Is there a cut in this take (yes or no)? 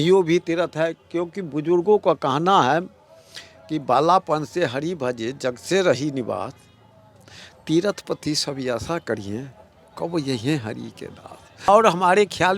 yes